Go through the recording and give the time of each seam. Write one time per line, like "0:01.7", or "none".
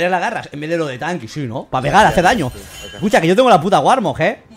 none